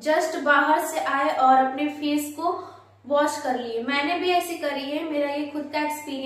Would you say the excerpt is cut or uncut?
uncut